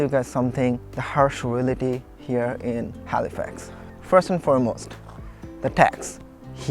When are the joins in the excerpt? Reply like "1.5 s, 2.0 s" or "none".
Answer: 0.9 s